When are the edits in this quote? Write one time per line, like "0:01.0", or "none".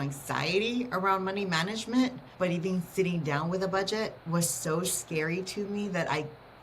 0:02.2
0:04.2